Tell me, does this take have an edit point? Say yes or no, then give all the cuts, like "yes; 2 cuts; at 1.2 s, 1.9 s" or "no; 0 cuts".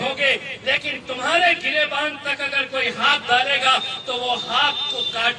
no; 0 cuts